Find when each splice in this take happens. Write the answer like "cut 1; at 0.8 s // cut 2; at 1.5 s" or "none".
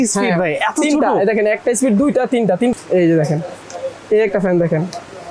cut 1; at 2.7 s

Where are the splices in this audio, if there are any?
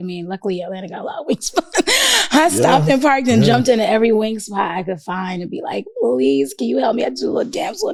none

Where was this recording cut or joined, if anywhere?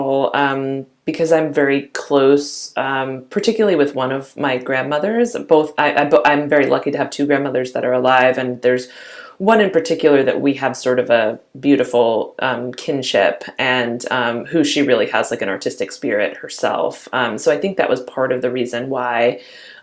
none

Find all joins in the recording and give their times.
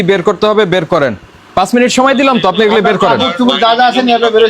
cut 1; at 1.5 s

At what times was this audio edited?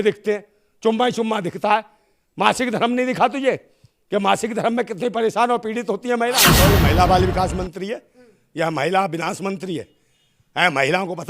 cut 1; at 6.6 s

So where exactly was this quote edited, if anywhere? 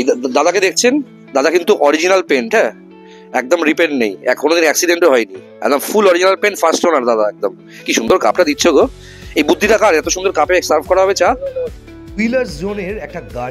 none

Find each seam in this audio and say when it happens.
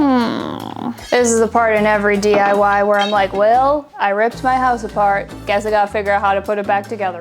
cut 1; at 1.0 s // cut 2; at 5.3 s

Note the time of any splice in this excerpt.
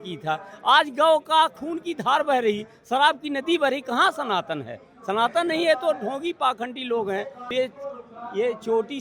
cut 1; at 7.5 s

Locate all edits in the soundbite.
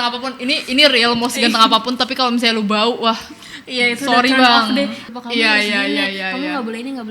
cut 1; at 5.0 s

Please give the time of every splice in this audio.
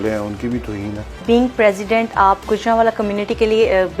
cut 1; at 1.2 s

